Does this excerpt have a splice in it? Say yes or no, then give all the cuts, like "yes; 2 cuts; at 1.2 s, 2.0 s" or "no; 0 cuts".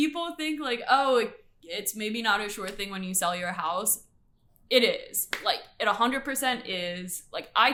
no; 0 cuts